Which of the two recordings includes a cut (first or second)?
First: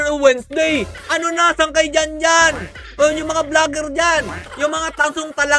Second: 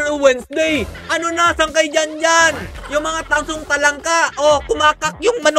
second